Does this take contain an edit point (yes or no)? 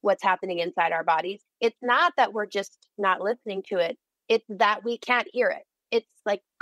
yes